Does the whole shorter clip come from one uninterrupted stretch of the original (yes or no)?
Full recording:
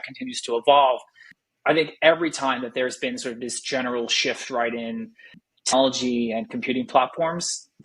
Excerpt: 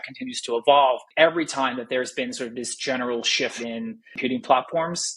no